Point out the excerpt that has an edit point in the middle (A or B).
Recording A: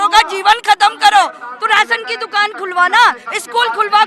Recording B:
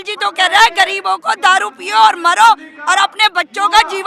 A